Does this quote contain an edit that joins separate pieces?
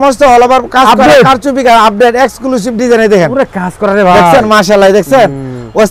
no; 0 cuts

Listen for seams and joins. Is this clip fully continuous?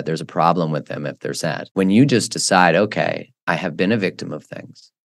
no; 1 cut; at 1.6 s

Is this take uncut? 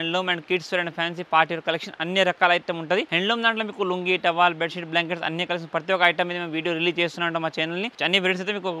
no; 2 cuts; at 3.1 s, 7.9 s

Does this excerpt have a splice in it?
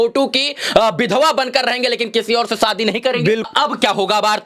yes; 1 cut; at 3.5 s

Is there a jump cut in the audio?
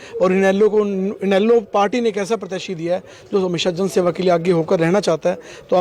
no; 0 cuts

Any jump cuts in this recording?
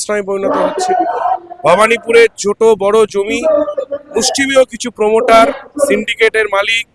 no; 0 cuts

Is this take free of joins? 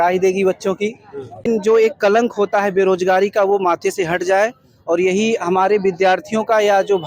no; 1 cut; at 1.4 s

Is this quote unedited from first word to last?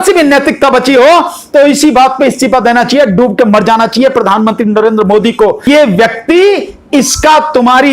no; 1 cut; at 5.6 s

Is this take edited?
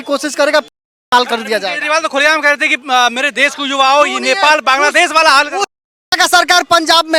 no; 0 cuts

